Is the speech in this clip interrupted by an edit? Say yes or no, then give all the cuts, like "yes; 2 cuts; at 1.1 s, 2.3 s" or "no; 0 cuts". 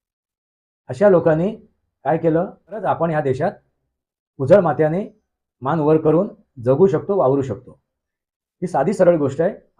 yes; 1 cut; at 2.8 s